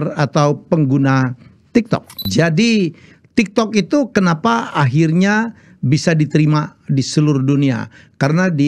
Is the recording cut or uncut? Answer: cut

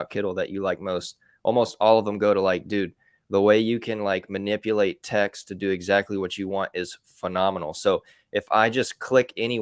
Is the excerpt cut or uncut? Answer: uncut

